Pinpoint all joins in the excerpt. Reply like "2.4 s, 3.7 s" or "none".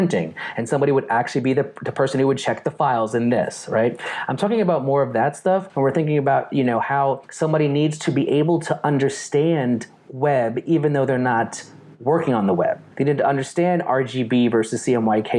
5.7 s, 7.3 s, 12.9 s